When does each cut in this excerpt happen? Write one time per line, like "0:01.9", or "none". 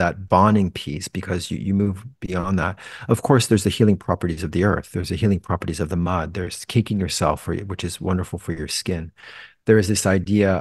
none